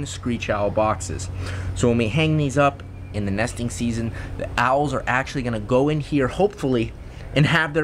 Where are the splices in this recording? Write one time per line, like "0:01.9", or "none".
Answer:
none